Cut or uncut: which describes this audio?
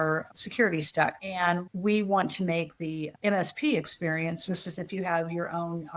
uncut